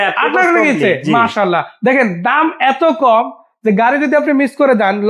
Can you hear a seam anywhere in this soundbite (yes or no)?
no